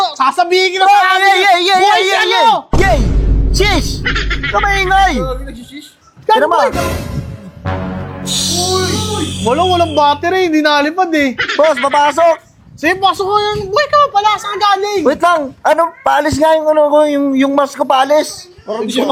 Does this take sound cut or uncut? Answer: uncut